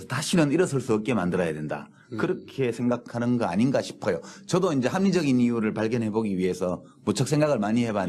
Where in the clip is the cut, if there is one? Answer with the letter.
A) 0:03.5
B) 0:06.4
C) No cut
A